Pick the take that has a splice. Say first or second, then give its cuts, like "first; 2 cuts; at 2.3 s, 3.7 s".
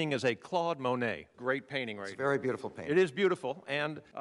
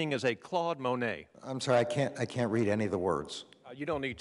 first; 1 cut; at 1.3 s